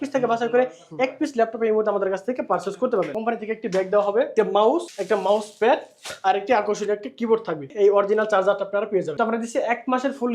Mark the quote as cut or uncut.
cut